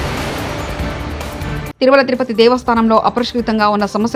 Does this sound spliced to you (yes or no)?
no